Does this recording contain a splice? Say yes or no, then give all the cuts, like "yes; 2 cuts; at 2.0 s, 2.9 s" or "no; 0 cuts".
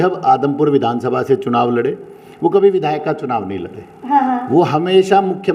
no; 0 cuts